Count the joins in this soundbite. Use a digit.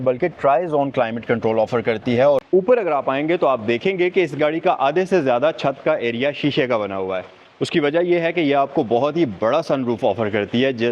1